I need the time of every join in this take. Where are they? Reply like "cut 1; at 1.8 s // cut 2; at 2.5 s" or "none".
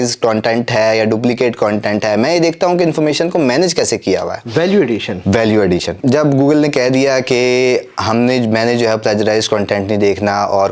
cut 1; at 6.0 s

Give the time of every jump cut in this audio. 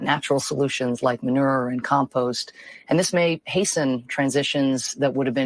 cut 1; at 1.2 s

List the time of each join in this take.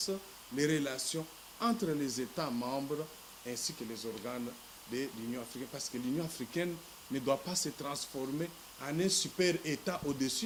none

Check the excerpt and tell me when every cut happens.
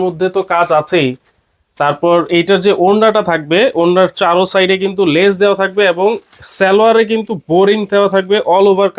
none

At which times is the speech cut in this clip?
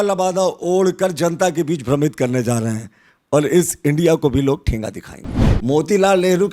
cut 1; at 5.5 s

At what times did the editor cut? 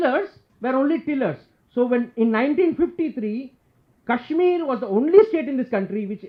none

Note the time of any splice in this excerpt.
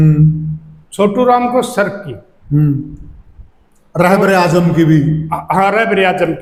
none

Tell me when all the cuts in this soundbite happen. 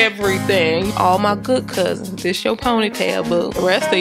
cut 1; at 0.9 s

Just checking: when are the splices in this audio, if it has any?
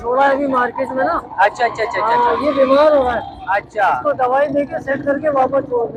none

